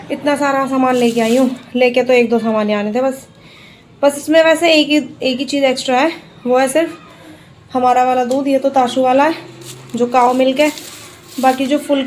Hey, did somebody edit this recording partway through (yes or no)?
no